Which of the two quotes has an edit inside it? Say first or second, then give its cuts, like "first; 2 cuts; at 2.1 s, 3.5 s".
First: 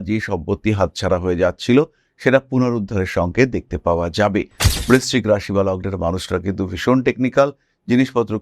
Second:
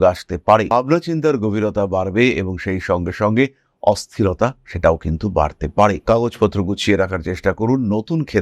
first; 1 cut; at 4.7 s